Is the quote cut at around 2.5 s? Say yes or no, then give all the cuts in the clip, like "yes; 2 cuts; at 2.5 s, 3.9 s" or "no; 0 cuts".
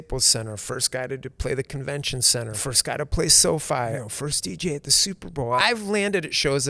yes; 3 cuts; at 2.5 s, 4.0 s, 5.6 s